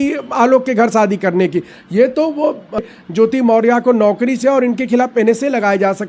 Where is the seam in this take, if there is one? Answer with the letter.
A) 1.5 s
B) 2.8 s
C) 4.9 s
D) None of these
B